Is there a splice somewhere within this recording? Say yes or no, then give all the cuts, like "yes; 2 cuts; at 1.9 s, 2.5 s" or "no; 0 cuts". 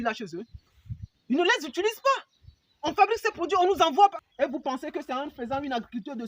yes; 1 cut; at 4.2 s